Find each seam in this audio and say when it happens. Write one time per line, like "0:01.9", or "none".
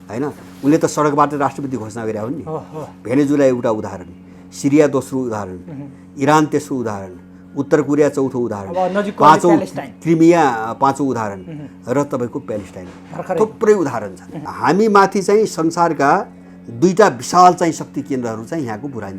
0:14.5